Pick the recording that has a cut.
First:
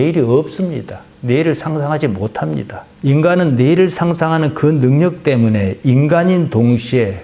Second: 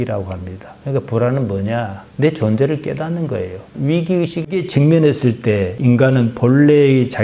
second; 2 cuts; at 3.7 s, 4.6 s

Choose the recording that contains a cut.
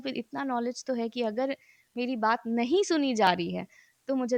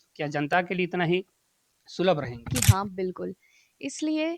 second; 1 cut; at 2.5 s

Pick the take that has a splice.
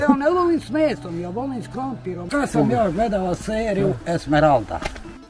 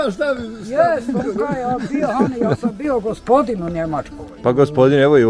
first; 1 cut; at 2.3 s

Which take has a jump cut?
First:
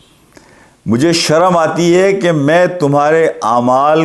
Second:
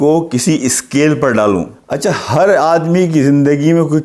second; 1 cut; at 1.8 s

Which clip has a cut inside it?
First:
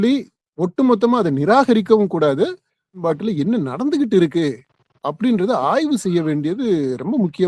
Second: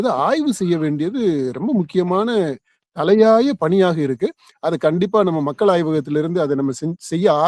first; 1 cut; at 3.0 s

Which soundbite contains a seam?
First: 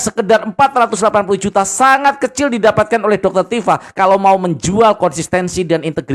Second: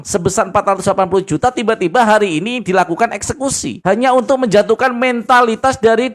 second; 1 cut; at 3.7 s

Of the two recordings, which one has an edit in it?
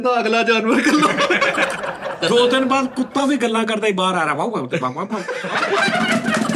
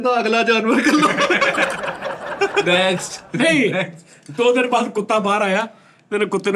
first; 1 cut; at 2.2 s

